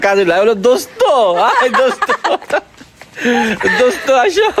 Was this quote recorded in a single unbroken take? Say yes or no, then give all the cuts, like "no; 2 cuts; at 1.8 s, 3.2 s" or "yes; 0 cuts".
yes; 0 cuts